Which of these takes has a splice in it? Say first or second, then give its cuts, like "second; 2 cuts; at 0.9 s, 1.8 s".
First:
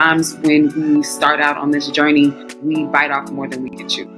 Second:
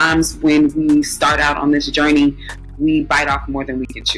first; 1 cut; at 2.5 s